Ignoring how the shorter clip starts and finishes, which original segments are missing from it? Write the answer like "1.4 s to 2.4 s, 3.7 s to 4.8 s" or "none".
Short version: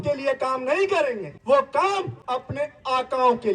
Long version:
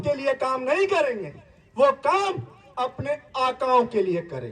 1.3 s to 1.6 s, 2.5 s to 2.7 s